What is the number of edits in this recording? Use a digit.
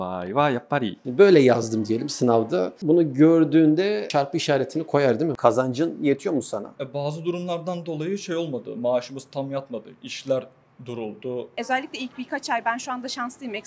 3